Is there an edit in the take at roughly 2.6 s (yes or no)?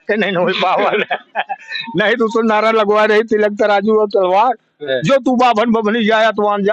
no